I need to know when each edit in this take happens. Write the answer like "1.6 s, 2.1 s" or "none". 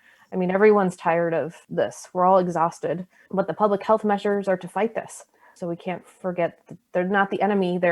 none